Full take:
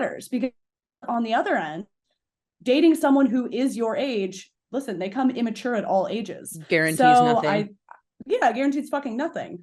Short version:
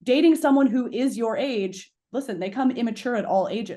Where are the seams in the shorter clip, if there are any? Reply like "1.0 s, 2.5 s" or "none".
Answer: none